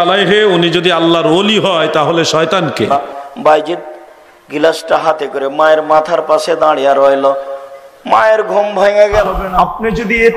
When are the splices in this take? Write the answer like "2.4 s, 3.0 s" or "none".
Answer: 2.9 s, 9.3 s